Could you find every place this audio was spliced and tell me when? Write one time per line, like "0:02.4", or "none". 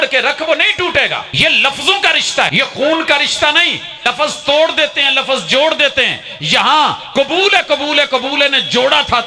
0:01.3
0:02.5
0:04.0